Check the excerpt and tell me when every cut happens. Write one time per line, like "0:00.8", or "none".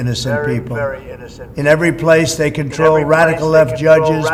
none